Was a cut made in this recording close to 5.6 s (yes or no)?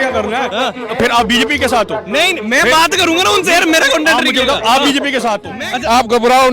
yes